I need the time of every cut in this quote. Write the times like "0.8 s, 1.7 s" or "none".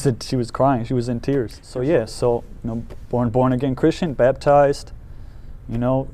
1.6 s